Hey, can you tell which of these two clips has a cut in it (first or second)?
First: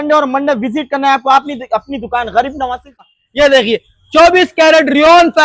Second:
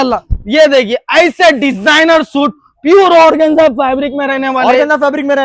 first